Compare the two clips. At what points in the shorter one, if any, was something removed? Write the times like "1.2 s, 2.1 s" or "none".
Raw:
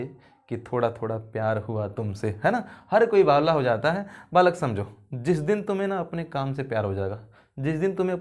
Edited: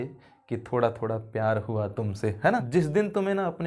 2.7 s